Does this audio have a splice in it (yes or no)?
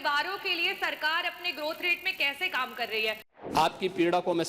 yes